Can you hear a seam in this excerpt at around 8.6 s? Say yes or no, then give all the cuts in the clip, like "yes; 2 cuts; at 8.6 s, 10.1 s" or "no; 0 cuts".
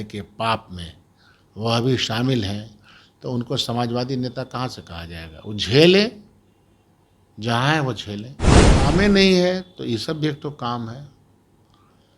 yes; 1 cut; at 8.6 s